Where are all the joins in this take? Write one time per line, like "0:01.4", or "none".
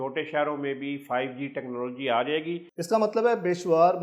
0:02.7